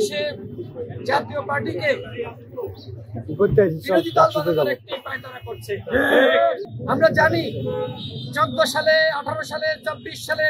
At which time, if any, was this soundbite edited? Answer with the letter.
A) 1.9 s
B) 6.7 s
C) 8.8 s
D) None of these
B